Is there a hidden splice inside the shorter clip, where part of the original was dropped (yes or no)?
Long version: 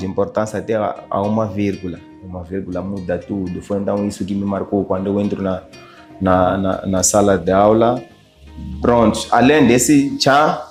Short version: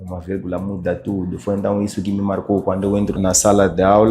yes